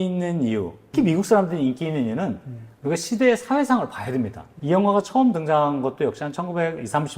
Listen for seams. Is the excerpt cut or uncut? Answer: cut